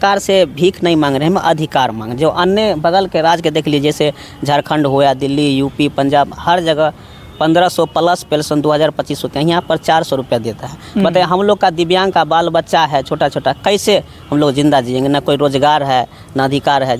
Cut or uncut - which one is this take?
uncut